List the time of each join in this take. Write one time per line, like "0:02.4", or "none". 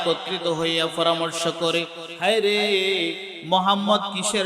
0:02.0
0:03.3